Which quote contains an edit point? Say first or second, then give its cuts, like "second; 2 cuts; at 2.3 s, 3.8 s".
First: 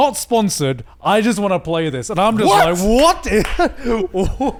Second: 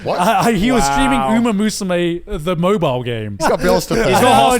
second; 1 cut; at 3.3 s